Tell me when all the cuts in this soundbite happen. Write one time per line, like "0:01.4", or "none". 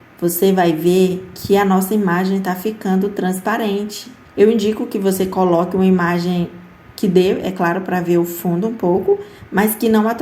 none